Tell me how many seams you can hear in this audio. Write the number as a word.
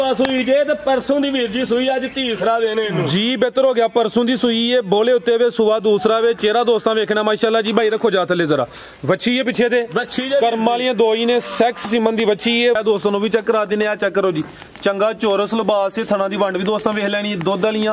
one